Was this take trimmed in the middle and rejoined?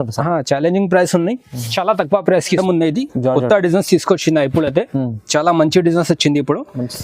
yes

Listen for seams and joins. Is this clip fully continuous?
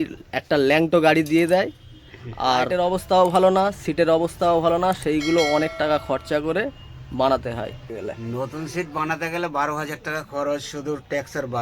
no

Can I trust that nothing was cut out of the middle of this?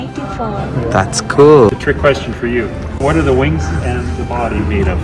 no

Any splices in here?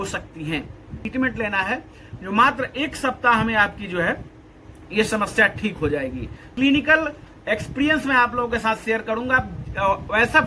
yes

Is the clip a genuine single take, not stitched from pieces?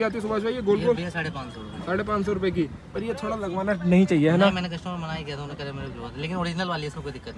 yes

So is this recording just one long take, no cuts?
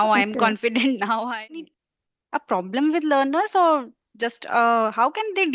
no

